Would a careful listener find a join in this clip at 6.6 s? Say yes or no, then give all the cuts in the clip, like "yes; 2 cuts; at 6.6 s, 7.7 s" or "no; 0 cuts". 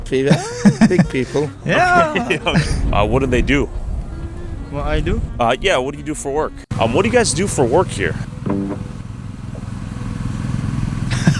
yes; 1 cut; at 6.6 s